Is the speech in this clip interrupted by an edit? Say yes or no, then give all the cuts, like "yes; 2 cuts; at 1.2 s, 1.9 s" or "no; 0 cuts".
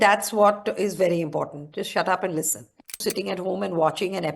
yes; 1 cut; at 3.0 s